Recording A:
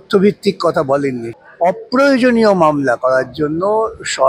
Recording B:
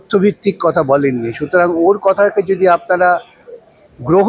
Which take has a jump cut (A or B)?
A